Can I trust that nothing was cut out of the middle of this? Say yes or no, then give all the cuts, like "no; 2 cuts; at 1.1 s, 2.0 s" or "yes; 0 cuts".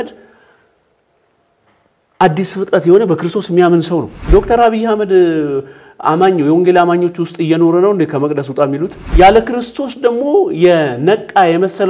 no; 2 cuts; at 4.2 s, 9.0 s